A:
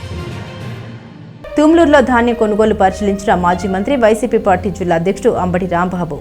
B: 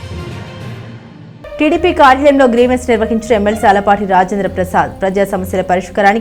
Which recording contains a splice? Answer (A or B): B